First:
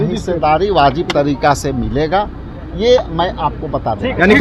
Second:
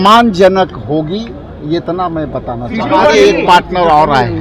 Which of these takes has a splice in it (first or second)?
second